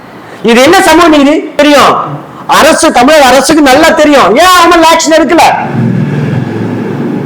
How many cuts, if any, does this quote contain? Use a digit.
1